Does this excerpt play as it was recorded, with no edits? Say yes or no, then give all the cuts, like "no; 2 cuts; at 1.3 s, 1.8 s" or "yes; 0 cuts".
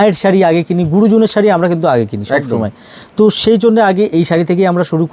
yes; 0 cuts